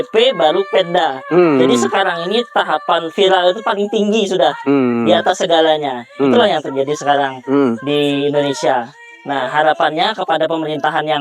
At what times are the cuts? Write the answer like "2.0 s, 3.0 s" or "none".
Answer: none